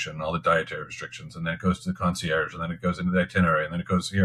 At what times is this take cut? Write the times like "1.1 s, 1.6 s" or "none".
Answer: none